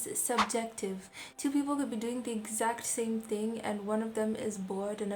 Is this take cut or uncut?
uncut